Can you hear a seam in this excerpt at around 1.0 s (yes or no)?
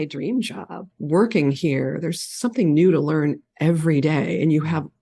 yes